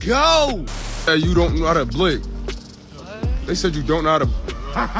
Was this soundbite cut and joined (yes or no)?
yes